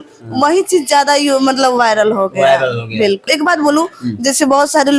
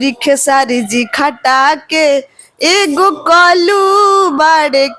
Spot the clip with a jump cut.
first; 1 cut; at 3.3 s

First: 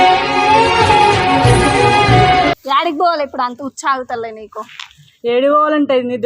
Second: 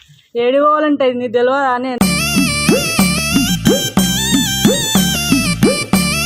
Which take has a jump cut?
first; 1 cut; at 2.6 s

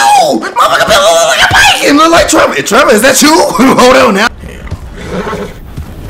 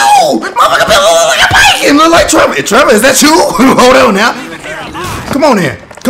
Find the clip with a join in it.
first; 1 cut; at 4.3 s

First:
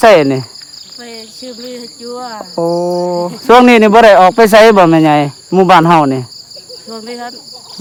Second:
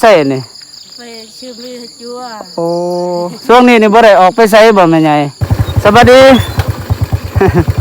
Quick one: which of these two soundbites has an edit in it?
second; 1 cut; at 5.4 s

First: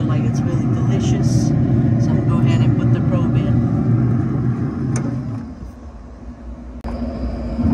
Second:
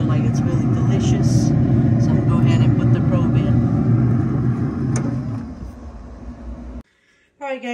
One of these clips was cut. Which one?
second; 1 cut; at 6.8 s

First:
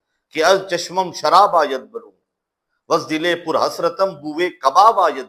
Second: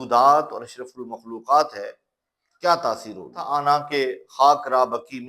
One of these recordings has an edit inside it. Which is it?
second; 1 cut; at 3.5 s

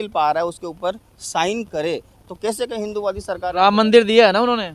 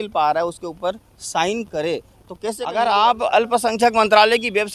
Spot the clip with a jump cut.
second; 1 cut; at 2.6 s

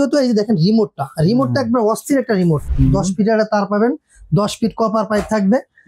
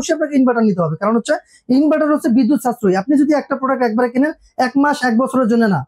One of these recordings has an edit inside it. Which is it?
first; 1 cut; at 2.7 s

